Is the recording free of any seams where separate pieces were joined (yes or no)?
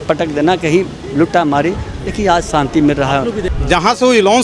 no